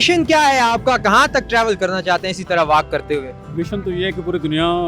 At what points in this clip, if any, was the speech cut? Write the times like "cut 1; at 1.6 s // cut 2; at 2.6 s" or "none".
cut 1; at 3.4 s

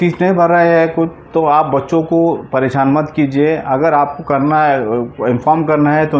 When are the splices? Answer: none

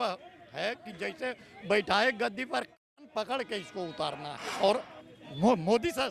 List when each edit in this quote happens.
cut 1; at 4.4 s

